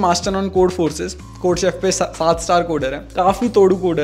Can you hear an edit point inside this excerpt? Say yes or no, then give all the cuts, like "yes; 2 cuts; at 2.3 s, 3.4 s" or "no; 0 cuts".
yes; 1 cut; at 3.0 s